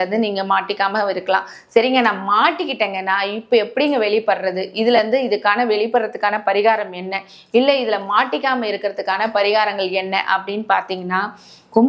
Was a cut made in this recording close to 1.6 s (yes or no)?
no